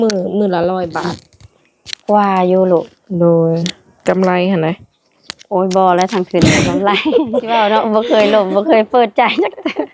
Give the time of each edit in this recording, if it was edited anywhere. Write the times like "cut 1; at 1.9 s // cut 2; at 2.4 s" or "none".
cut 1; at 7.5 s